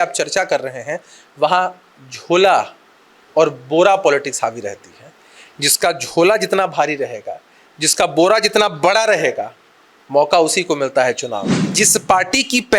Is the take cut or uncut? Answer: cut